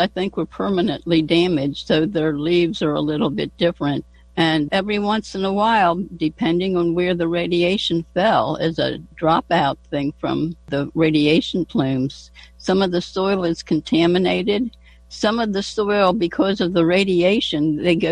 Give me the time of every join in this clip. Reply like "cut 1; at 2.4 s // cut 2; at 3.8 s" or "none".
cut 1; at 4.7 s // cut 2; at 9.1 s // cut 3; at 10.7 s